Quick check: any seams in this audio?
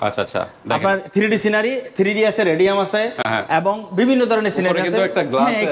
no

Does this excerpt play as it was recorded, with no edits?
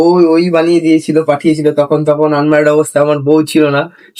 yes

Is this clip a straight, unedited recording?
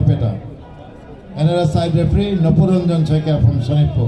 yes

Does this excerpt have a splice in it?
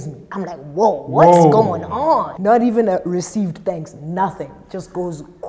yes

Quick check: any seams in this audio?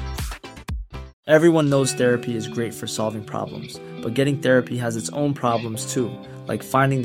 yes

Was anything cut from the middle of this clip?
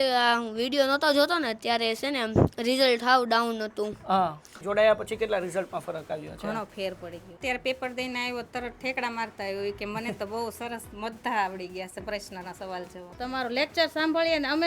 yes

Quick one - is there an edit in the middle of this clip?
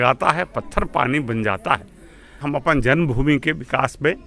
yes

